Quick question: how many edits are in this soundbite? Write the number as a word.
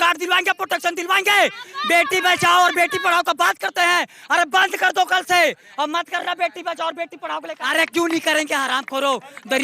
one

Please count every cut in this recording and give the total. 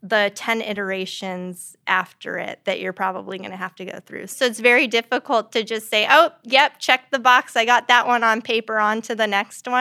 one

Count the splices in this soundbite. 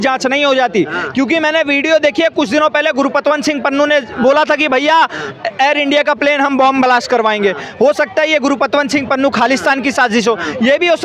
zero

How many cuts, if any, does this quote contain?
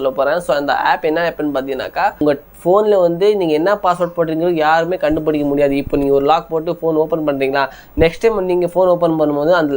one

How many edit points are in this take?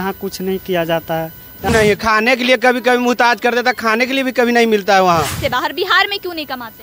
two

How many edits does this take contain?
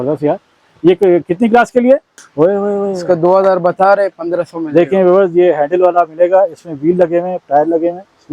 one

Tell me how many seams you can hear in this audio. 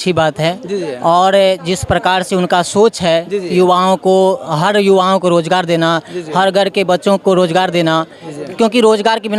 zero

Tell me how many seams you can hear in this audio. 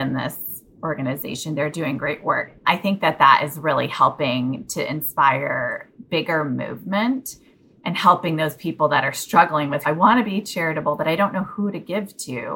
two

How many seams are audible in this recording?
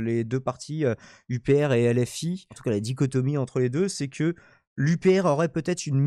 one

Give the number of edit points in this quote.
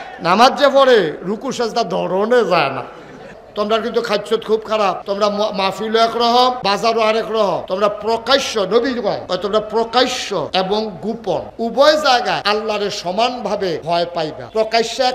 nine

